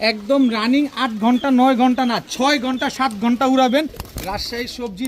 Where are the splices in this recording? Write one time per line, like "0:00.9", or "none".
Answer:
0:04.0

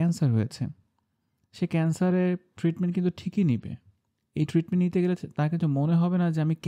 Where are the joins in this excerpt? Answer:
none

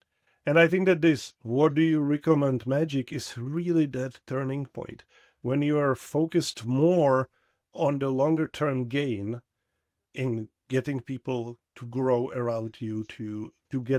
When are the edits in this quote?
none

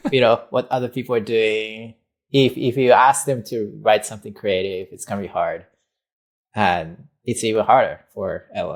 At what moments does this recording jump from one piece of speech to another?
none

